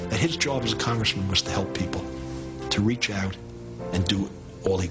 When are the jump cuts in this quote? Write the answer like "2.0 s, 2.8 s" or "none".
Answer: 2.2 s